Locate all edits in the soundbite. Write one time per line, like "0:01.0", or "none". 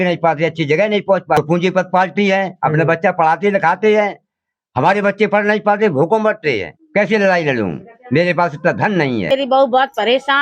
0:01.4
0:06.7
0:09.3